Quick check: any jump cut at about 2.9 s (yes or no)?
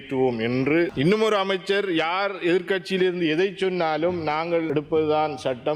no